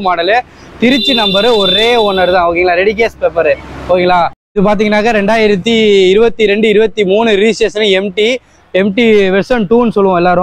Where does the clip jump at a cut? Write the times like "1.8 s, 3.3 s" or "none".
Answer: 4.4 s